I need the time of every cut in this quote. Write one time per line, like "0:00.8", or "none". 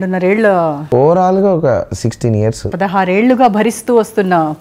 0:00.8
0:02.6

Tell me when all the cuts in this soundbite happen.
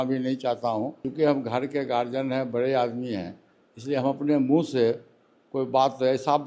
0:01.0

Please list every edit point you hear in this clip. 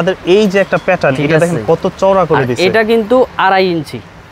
none

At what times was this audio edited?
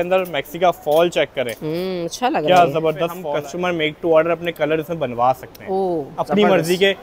0:03.2

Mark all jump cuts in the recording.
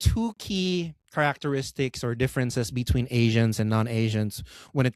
none

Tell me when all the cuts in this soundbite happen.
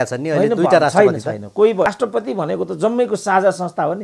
0:01.9

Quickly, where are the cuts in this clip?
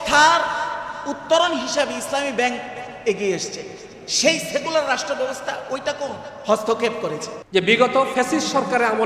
0:07.3

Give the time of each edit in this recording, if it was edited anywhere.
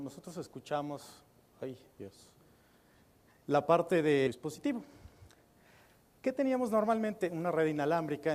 none

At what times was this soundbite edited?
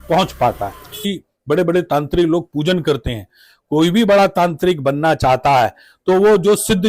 0:01.0

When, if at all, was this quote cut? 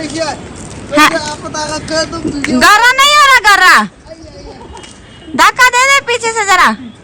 none

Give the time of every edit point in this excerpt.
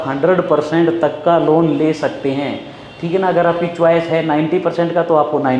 none

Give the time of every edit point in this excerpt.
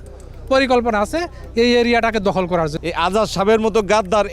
0:02.7

